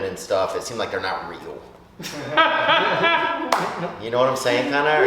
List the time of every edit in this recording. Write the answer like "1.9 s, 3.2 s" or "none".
none